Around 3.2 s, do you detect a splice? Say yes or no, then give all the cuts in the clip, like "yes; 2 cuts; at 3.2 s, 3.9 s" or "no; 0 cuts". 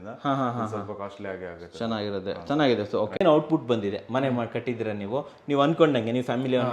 yes; 1 cut; at 3.2 s